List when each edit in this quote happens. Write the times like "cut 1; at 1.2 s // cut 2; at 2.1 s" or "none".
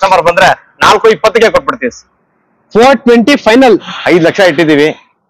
cut 1; at 3.9 s